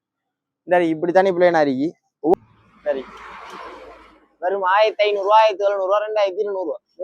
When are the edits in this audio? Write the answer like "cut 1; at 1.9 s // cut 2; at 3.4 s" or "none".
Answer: cut 1; at 2.3 s